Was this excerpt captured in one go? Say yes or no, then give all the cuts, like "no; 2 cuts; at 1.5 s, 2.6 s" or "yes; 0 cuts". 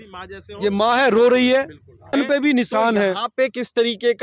no; 1 cut; at 2.1 s